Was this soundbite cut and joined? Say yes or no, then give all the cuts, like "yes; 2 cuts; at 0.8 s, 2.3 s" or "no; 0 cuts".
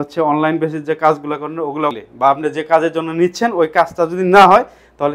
yes; 1 cut; at 2.0 s